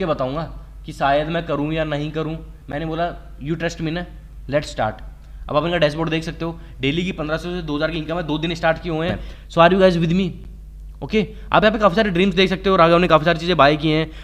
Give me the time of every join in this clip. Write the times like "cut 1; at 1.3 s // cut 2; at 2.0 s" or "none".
cut 1; at 9.3 s